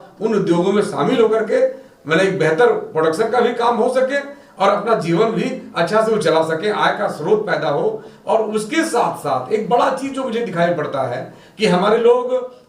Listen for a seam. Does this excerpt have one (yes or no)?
no